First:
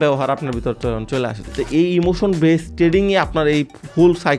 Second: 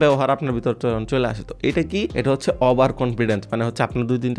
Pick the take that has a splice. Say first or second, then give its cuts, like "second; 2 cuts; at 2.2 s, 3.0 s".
first; 1 cut; at 1.5 s